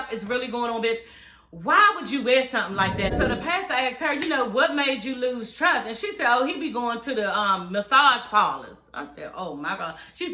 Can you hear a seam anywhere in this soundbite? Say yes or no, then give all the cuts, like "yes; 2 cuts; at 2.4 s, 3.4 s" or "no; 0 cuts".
yes; 1 cut; at 3.1 s